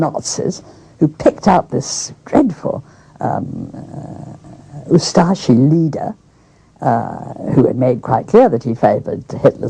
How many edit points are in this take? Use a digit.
0